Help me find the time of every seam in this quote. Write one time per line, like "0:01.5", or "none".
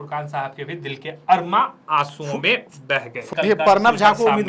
0:03.2